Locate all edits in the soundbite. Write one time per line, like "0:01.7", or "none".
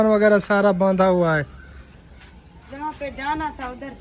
none